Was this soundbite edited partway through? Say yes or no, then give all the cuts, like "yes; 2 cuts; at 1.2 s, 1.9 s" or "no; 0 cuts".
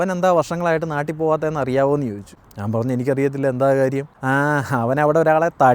no; 0 cuts